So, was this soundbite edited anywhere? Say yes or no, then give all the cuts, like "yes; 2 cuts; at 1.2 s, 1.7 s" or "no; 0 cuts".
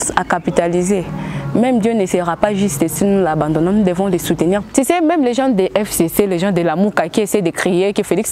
yes; 1 cut; at 4.6 s